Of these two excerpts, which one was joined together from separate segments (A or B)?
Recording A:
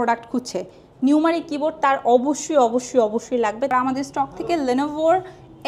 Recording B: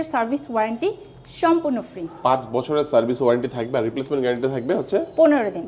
A